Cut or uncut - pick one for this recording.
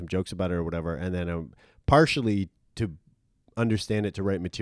uncut